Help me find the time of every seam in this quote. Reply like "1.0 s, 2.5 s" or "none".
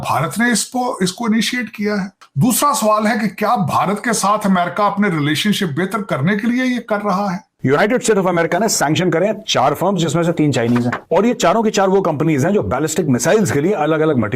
2.2 s, 7.5 s